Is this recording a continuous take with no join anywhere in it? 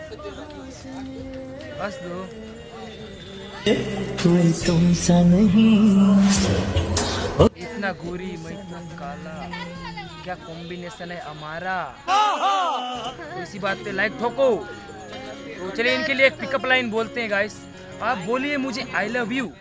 yes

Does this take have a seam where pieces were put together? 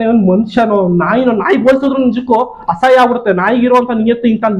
no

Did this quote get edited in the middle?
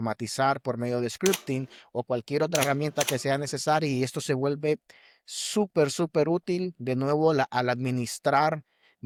no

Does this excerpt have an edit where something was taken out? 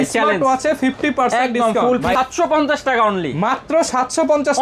yes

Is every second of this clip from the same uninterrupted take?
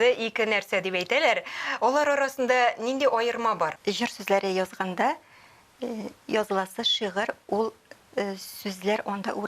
no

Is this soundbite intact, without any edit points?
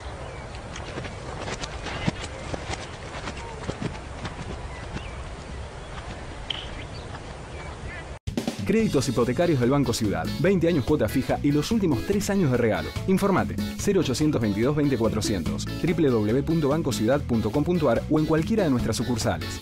yes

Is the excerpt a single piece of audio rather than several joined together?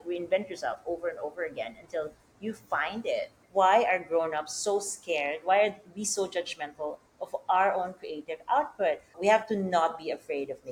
no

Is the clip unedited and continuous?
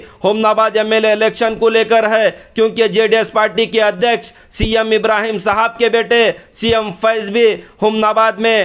yes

